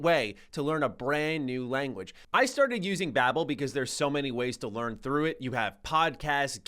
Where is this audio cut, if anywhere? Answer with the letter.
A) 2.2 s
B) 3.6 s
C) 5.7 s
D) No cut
A